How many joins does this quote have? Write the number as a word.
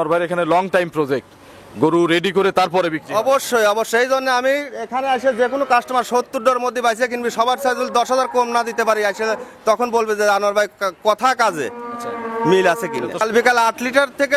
one